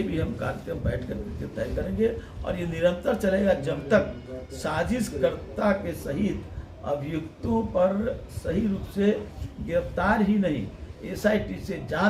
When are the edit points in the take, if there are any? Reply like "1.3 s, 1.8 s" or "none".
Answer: none